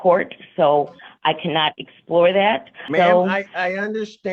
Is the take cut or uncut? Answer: cut